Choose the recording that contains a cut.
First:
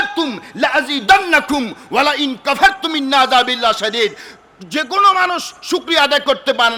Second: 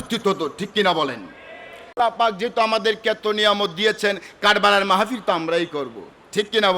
second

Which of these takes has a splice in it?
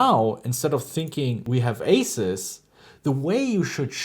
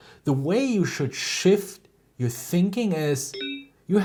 first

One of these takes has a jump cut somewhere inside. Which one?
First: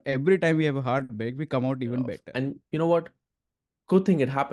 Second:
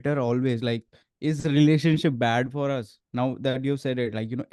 first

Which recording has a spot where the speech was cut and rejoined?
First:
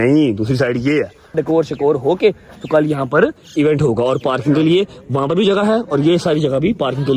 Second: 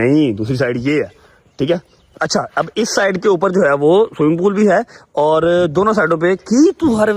first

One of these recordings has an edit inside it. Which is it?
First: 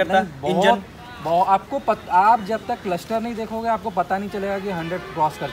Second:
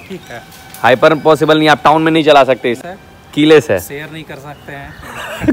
second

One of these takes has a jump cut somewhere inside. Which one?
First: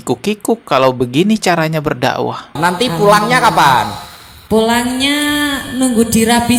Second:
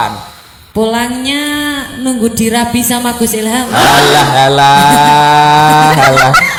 first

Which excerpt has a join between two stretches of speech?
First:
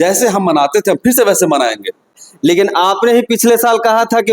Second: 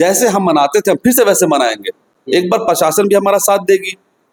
first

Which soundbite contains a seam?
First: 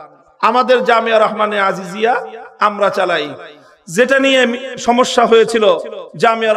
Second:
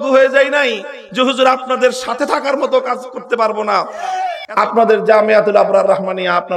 second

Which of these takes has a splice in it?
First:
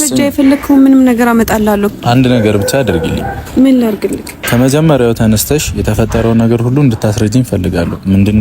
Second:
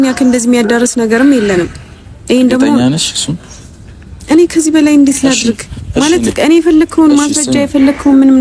first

